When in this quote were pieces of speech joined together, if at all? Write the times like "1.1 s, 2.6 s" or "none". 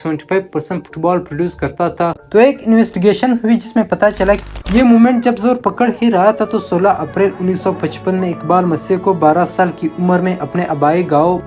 4.4 s